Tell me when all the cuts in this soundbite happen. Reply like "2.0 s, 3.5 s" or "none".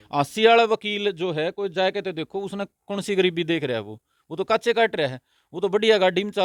none